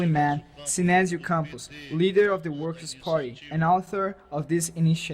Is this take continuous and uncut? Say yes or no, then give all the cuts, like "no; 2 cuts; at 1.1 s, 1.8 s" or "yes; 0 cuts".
no; 1 cut; at 3.4 s